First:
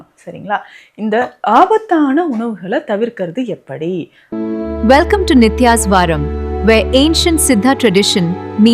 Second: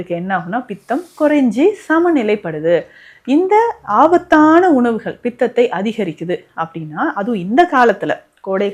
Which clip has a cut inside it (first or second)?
first